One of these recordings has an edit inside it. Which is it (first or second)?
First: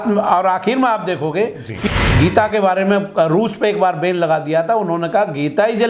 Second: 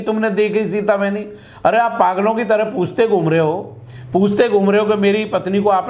first